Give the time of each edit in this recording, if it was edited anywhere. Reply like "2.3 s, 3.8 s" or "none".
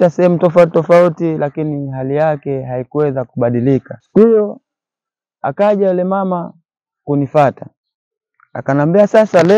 4.0 s